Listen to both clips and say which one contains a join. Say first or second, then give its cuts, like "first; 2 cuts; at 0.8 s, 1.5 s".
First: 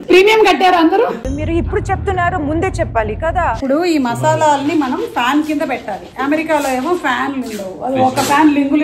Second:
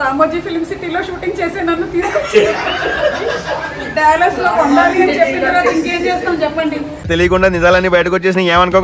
first; 1 cut; at 1.2 s